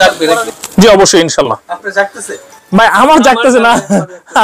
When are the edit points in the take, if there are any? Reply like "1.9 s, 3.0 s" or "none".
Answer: none